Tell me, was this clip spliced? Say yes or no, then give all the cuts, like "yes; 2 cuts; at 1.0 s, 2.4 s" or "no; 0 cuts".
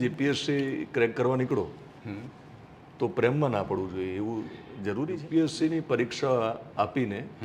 yes; 1 cut; at 5.2 s